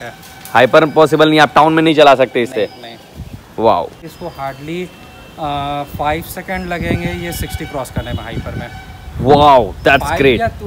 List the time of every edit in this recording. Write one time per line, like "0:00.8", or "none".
none